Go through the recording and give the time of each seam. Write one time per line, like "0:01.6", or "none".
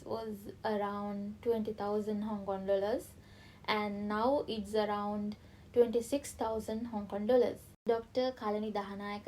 0:07.7